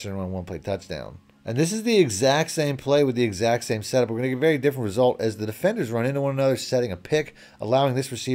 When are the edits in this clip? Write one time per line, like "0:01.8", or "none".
0:01.2